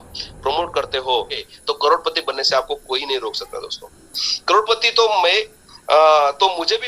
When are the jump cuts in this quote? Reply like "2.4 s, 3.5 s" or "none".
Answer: 1.4 s